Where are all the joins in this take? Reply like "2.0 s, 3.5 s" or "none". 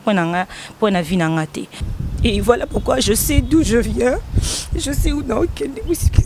1.8 s